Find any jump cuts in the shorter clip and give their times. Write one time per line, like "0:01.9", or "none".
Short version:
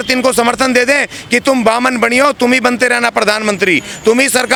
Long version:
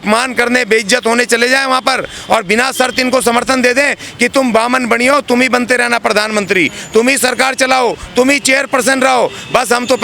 none